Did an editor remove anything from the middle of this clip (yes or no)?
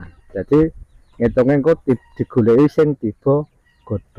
no